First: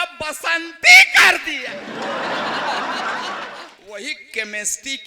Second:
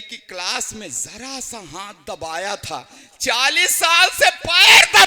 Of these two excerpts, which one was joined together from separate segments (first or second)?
first